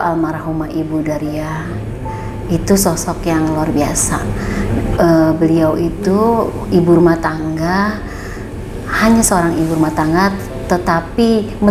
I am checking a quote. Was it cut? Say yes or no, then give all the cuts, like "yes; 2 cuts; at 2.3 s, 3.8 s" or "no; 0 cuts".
no; 0 cuts